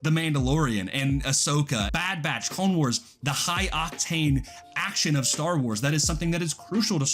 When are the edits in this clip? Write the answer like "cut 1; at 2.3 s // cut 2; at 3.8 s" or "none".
cut 1; at 1.8 s